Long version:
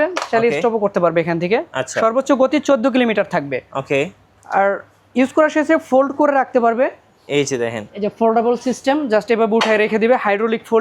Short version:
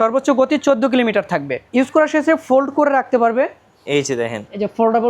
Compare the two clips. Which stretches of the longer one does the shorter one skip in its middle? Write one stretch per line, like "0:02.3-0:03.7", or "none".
0:03.6-0:05.0